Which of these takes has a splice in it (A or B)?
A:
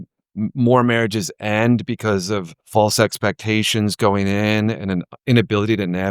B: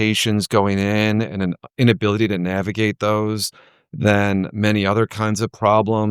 A